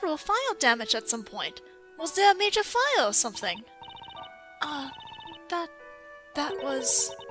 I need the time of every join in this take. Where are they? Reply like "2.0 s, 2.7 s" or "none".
2.1 s

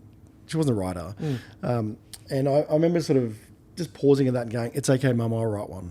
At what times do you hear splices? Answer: none

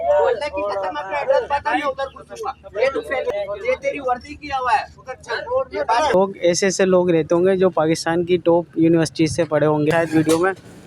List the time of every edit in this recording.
3.3 s, 6.1 s, 9.9 s

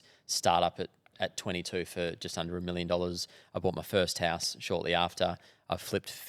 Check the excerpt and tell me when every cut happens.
none

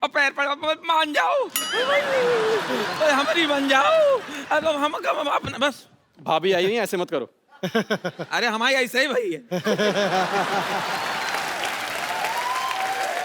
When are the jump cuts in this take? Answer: none

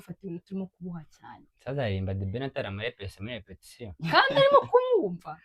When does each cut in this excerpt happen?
none

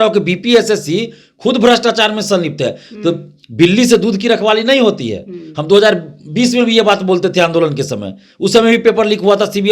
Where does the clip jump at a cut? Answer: none

